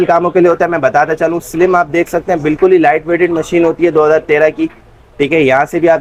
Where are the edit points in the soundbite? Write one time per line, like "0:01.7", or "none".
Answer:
none